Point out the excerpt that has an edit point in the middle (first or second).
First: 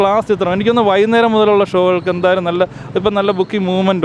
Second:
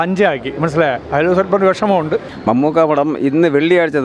second